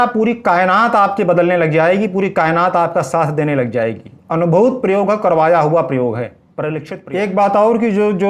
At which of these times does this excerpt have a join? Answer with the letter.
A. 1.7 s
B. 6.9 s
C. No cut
B